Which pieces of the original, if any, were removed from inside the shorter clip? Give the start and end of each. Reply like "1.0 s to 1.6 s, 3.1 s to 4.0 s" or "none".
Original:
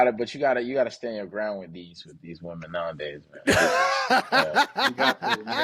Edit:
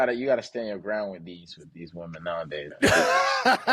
3.2 s to 3.4 s